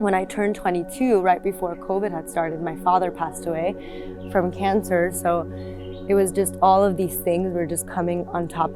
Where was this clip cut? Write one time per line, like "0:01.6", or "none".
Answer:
none

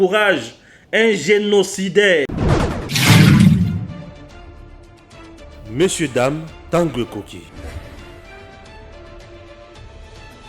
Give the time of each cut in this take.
0:02.3

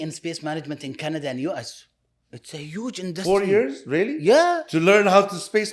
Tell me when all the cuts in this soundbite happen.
none

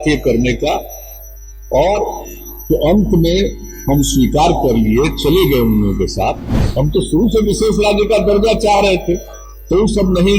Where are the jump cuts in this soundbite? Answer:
0:06.5

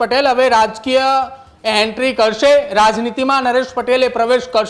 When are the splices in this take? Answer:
none

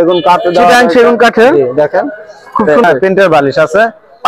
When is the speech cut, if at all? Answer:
0:02.8

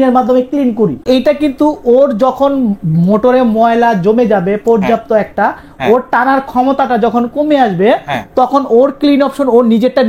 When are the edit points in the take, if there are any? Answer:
0:01.0

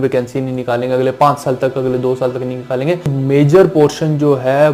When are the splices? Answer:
0:03.1

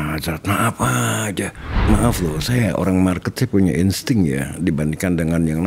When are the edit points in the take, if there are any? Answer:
0:01.8

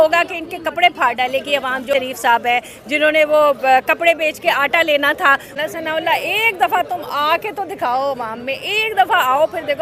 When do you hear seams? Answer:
0:01.8
0:05.5

